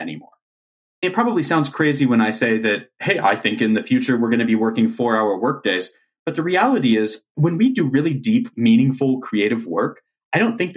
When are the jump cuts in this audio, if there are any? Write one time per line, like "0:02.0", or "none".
0:01.0
0:07.3
0:08.5